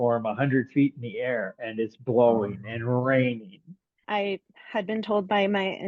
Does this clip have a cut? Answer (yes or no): yes